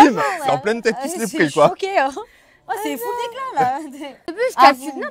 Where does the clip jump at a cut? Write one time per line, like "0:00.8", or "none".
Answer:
0:04.2